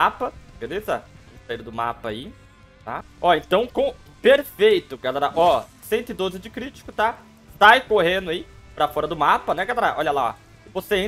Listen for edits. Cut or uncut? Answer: cut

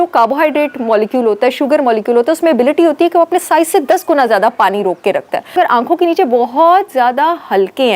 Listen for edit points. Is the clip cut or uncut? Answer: cut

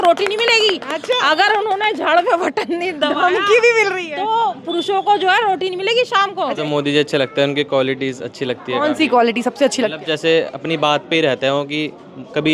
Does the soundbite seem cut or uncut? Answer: cut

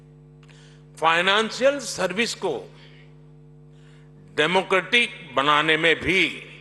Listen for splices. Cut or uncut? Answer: uncut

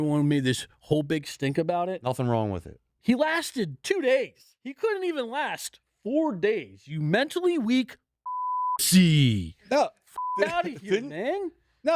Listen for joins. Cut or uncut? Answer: cut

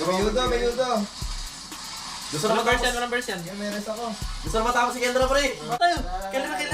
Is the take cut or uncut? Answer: cut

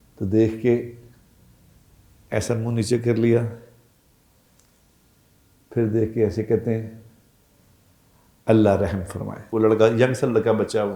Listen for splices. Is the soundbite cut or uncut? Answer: cut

